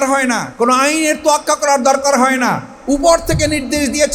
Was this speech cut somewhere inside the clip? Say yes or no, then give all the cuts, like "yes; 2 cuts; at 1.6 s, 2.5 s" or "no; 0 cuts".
no; 0 cuts